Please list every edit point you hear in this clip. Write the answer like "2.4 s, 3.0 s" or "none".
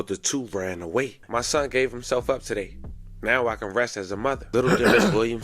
1.2 s, 4.4 s

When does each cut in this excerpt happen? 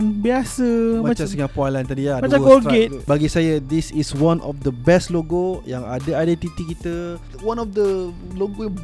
3.1 s, 7.2 s

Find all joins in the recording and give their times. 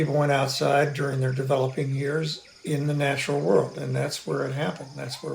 none

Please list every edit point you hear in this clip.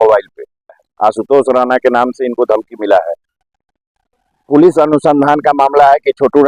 0.9 s, 3.1 s

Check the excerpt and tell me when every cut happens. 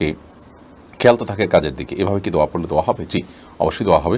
none

